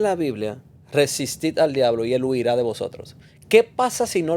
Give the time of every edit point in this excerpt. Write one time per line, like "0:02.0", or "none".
none